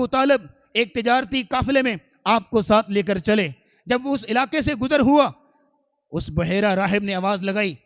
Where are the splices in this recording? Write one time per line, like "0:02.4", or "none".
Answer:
none